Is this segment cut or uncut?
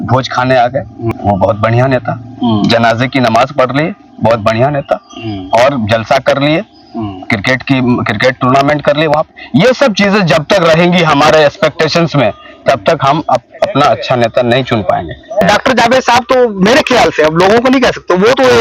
cut